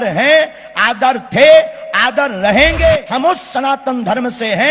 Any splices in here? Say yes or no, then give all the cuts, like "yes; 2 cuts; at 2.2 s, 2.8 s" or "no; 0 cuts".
yes; 1 cut; at 3.1 s